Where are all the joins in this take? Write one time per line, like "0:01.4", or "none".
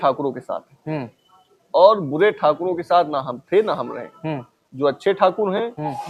none